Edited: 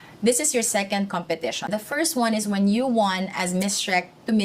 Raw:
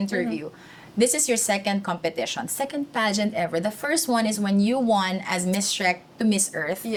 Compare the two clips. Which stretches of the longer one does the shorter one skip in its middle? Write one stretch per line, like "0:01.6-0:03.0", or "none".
0:02.4-0:03.6